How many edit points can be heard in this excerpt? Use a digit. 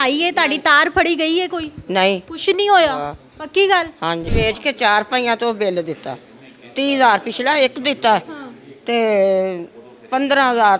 1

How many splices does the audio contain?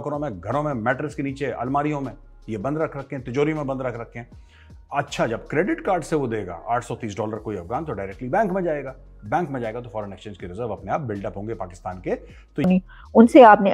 1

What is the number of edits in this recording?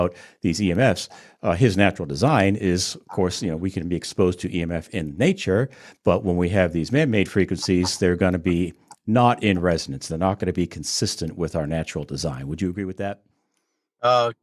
0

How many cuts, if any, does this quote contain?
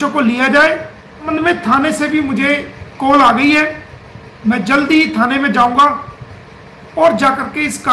1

